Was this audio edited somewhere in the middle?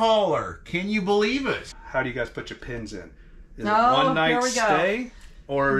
yes; 1 cut; at 1.7 s

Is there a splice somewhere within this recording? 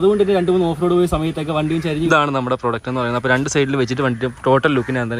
yes; 1 cut; at 2.1 s

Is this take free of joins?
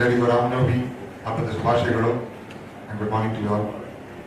no; 1 cut; at 3.3 s

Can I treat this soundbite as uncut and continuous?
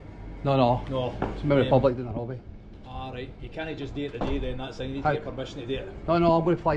yes; 0 cuts

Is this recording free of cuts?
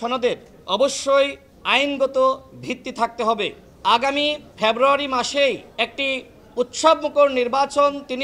no; 1 cut; at 3.6 s

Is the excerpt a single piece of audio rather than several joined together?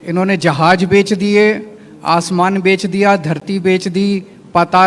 yes; 0 cuts

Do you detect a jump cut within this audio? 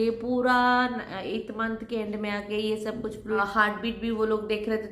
yes; 1 cut; at 3.4 s

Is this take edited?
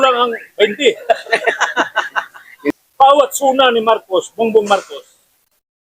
yes; 1 cut; at 2.7 s

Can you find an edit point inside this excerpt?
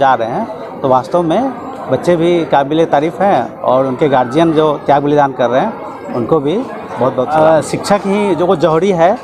yes; 1 cut; at 7.3 s

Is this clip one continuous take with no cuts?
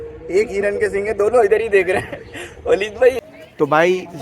no; 1 cut; at 3.2 s

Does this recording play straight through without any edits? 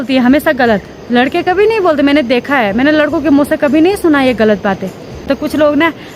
no; 1 cut; at 5.2 s

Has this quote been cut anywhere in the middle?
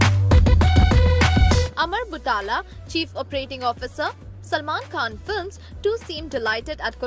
no; 0 cuts

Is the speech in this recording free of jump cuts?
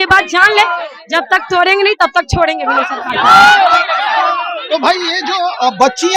yes; 0 cuts

